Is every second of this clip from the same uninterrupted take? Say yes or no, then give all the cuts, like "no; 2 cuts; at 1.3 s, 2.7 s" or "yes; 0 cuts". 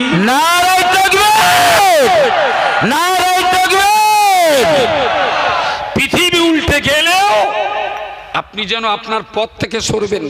yes; 0 cuts